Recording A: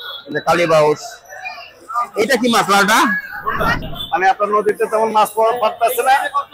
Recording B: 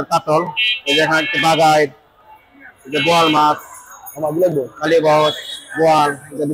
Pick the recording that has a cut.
A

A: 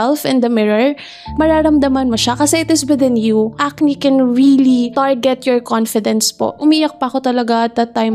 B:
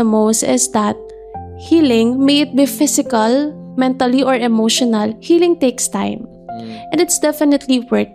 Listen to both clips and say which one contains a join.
A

